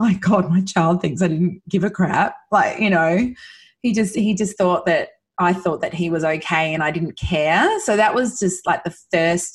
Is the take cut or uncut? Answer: uncut